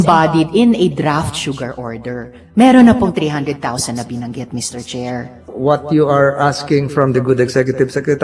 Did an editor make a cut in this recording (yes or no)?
yes